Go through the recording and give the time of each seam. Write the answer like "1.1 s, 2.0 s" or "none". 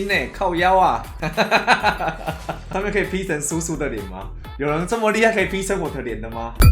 2.6 s